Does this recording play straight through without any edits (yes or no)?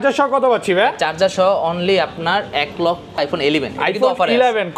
no